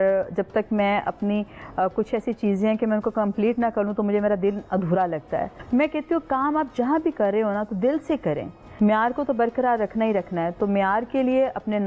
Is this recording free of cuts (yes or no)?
no